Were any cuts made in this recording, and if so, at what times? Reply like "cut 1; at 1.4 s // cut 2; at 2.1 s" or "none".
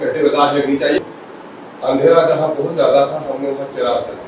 cut 1; at 1.0 s